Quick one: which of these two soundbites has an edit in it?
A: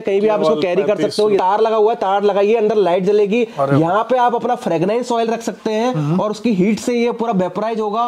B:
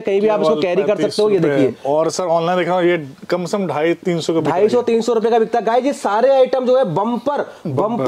A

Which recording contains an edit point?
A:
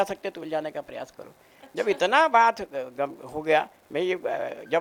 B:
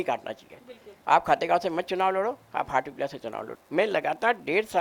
B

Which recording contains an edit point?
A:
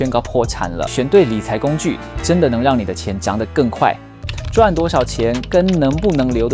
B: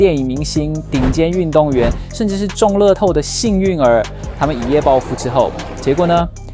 A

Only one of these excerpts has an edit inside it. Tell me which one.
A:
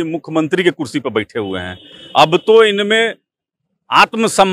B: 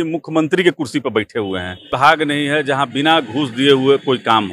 B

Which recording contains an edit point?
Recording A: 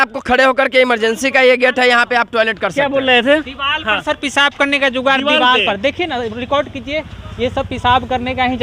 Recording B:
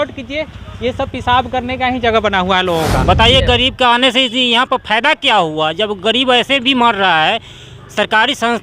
B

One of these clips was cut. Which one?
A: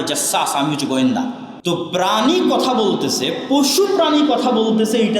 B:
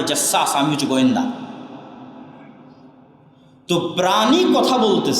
A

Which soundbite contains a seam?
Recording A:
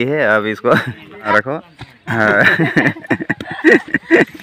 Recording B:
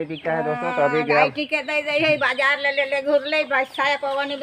A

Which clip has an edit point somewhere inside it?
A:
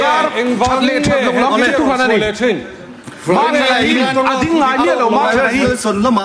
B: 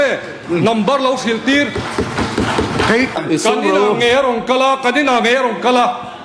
B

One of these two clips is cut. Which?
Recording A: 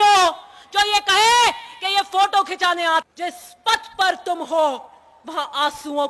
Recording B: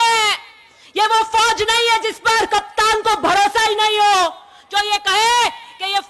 A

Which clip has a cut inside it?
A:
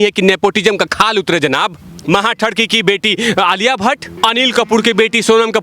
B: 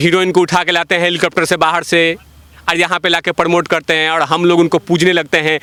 A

